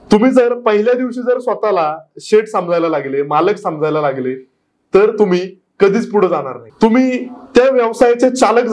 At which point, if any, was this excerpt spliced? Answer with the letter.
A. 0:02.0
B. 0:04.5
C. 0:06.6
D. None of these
C